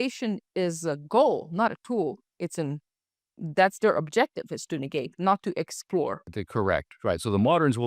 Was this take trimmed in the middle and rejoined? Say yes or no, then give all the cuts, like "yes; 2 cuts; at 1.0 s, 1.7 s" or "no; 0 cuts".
yes; 1 cut; at 6.2 s